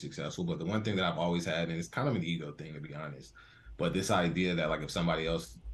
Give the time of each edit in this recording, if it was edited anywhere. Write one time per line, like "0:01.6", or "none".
none